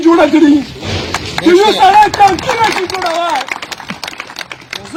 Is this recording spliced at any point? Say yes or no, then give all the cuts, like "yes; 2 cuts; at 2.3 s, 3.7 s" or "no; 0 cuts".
no; 0 cuts